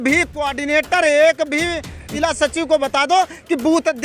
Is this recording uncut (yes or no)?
no